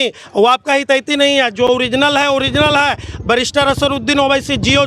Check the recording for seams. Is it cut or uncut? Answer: uncut